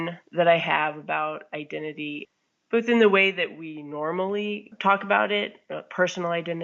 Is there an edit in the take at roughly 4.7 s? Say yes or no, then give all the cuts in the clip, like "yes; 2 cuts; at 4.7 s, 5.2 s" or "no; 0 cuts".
yes; 2 cuts; at 2.2 s, 4.7 s